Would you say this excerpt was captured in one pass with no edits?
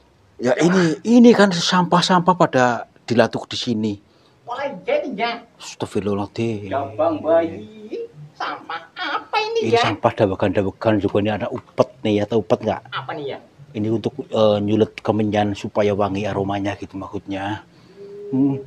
yes; 0 cuts

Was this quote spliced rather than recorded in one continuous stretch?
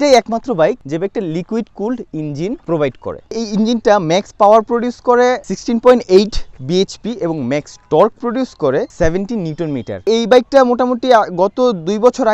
no; 0 cuts

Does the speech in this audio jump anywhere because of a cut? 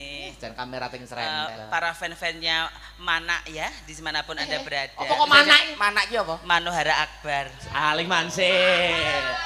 no; 0 cuts

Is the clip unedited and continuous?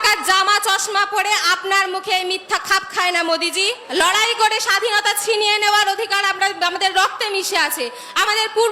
no; 1 cut; at 3.8 s

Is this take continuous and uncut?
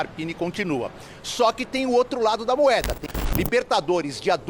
no; 1 cut; at 3.0 s

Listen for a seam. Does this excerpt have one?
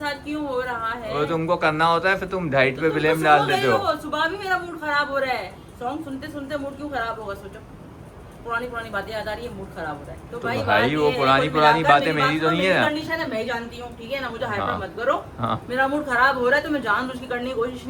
no; 0 cuts

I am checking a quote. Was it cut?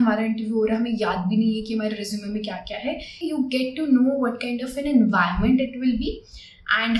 yes; 1 cut; at 3.1 s

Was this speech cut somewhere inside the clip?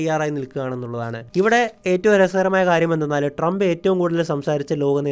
yes; 1 cut; at 1.2 s

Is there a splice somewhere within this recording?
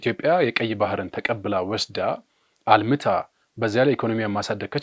no; 0 cuts

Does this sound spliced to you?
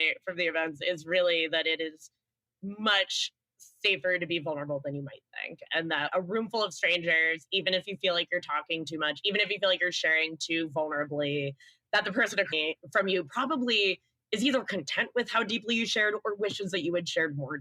no; 0 cuts

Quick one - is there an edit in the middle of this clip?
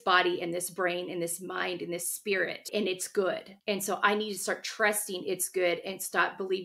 yes; 1 cut; at 2.7 s

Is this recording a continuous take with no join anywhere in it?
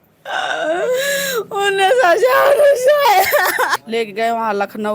no; 1 cut; at 3.8 s

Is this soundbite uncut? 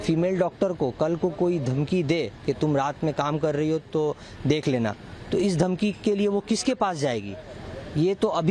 yes; 0 cuts

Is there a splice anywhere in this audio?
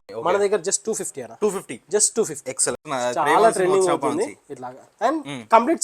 yes; 1 cut; at 2.9 s

